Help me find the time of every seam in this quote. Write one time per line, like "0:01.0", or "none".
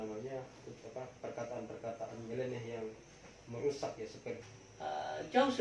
0:04.5

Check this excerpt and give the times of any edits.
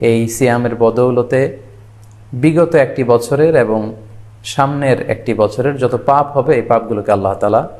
none

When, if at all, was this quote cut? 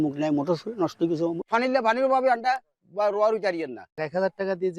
0:01.4
0:03.7

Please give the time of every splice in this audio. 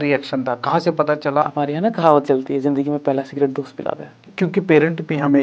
0:01.4
0:04.2

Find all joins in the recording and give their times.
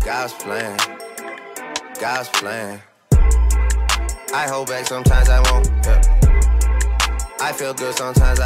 none

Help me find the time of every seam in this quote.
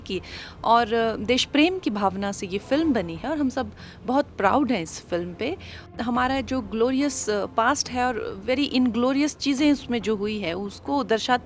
0:05.9

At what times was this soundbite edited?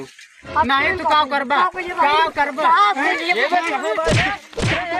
none

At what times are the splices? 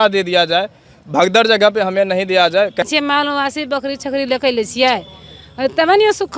0:02.8

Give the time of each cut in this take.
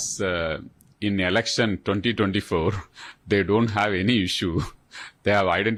none

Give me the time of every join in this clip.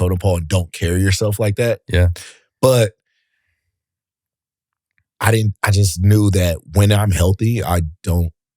none

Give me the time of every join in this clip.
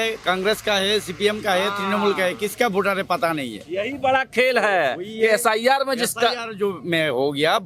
none

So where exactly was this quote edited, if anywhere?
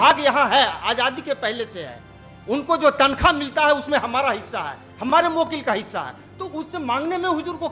none

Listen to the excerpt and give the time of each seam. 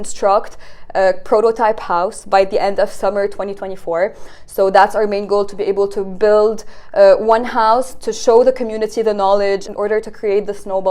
0:09.7

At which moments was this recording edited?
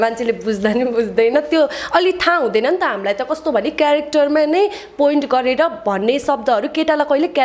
none

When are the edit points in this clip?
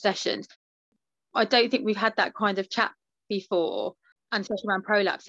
0:00.9
0:04.3

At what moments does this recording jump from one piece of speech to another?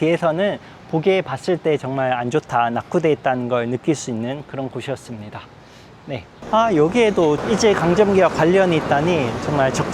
0:06.2

